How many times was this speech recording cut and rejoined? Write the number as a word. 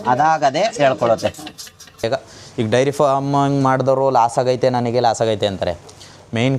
one